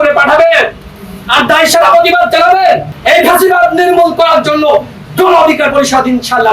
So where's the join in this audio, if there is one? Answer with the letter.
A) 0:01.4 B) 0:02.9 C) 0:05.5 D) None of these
B